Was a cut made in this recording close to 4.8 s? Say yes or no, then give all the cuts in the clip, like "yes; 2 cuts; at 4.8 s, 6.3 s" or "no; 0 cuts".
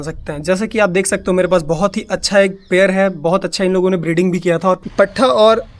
yes; 1 cut; at 4.8 s